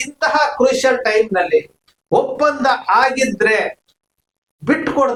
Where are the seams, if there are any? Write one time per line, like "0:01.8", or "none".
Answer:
none